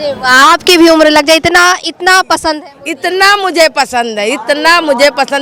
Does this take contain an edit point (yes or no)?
no